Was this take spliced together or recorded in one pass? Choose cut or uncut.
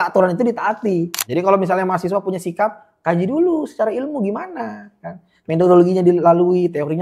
cut